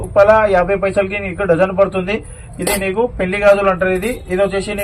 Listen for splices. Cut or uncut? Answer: uncut